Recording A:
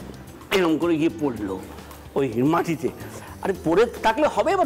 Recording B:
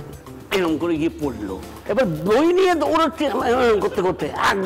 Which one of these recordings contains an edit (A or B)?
B